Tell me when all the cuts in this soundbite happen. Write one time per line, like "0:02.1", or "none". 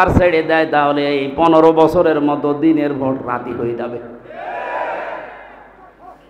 none